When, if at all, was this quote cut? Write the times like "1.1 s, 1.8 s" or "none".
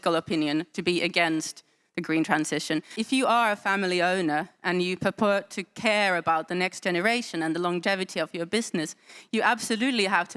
2.9 s